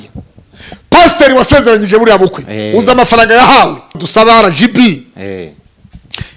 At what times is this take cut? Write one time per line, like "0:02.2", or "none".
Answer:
0:04.0